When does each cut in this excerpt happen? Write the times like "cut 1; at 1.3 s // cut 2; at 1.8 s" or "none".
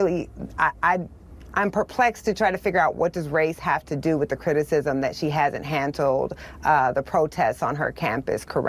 none